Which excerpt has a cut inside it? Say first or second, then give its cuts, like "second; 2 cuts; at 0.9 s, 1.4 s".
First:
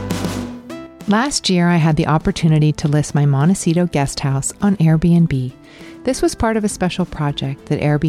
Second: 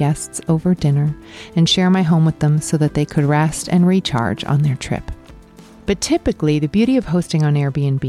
first; 1 cut; at 0.9 s